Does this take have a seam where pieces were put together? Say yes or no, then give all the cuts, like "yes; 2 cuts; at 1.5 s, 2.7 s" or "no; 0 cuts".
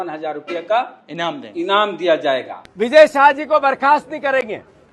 yes; 1 cut; at 2.6 s